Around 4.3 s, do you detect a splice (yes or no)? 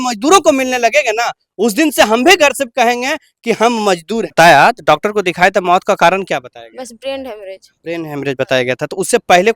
yes